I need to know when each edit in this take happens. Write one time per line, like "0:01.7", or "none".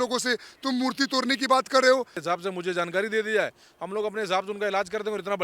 0:02.3

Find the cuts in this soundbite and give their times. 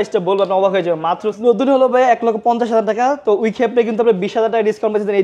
0:01.3

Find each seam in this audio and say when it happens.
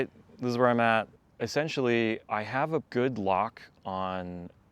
0:01.2
0:02.4

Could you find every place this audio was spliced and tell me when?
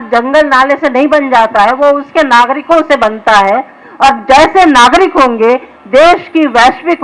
none

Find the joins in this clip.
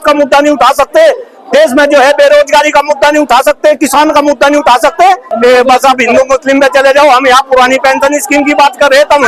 0:05.3

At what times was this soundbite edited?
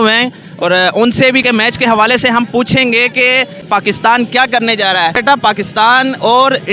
0:01.4
0:03.6
0:05.2

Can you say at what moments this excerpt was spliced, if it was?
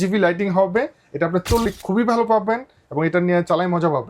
0:01.6

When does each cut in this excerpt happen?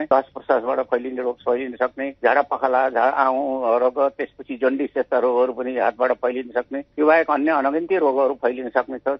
none

